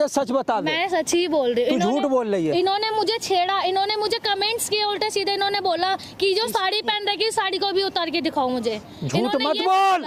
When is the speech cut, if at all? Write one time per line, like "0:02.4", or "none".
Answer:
none

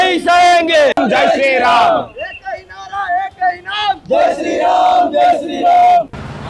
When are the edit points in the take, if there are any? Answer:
none

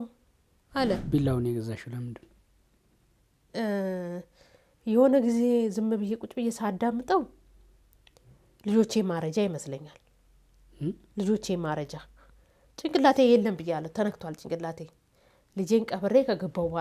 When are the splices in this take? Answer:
0:01.0

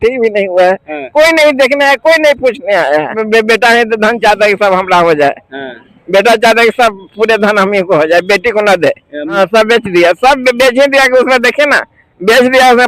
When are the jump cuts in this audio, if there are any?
0:03.2
0:09.2

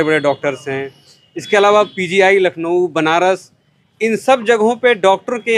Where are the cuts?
none

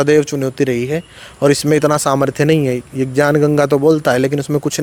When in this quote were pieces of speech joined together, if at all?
none

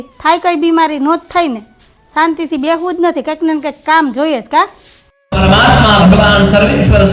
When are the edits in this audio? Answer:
0:05.2

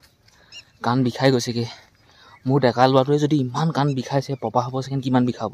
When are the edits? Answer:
none

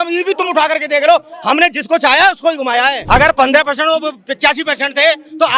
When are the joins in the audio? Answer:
0:03.0

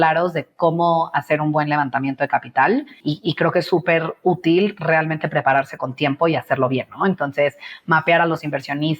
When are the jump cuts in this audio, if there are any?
0:03.0

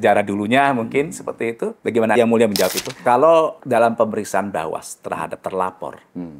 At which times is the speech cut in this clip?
0:02.8
0:03.6

